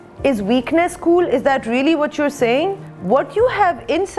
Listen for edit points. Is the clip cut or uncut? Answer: cut